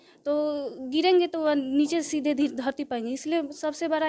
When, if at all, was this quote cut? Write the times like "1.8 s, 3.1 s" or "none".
none